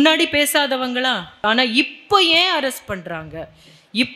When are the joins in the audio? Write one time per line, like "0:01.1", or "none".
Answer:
0:01.4